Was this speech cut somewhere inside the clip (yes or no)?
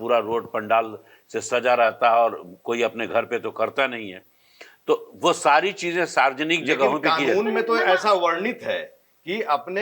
no